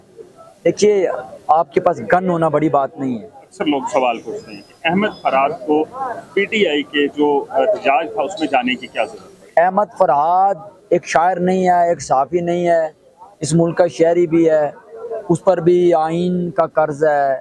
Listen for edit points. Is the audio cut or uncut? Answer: cut